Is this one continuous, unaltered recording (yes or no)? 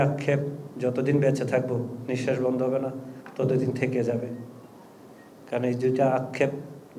yes